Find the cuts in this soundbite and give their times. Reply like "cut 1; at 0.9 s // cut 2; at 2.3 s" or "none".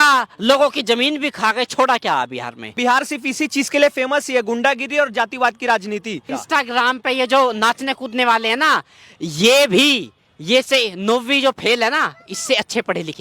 cut 1; at 2.8 s // cut 2; at 6.3 s